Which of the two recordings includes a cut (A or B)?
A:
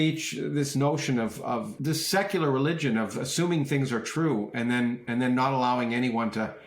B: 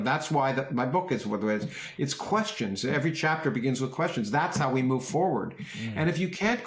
A